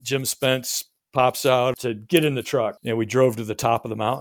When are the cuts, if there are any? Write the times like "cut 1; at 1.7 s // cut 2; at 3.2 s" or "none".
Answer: cut 1; at 1.8 s // cut 2; at 2.8 s

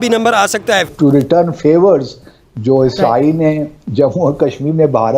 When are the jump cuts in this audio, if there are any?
cut 1; at 0.9 s

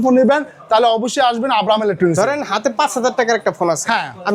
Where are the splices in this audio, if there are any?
none

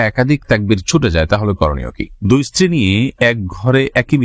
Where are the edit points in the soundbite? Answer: cut 1; at 2.1 s

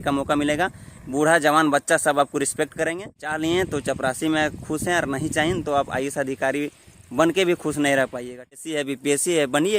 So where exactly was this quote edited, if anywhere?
cut 1; at 3.3 s // cut 2; at 8.6 s

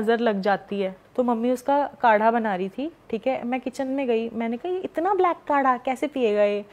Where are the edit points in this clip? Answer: cut 1; at 1.0 s

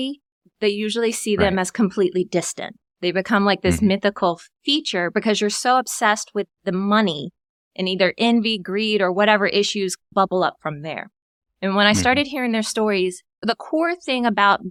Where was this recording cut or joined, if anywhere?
none

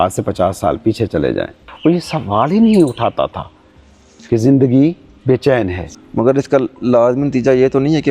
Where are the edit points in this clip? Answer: cut 1; at 1.6 s // cut 2; at 5.8 s

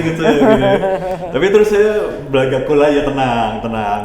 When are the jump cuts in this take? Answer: none

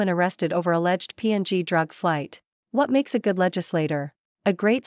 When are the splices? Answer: cut 1; at 2.5 s

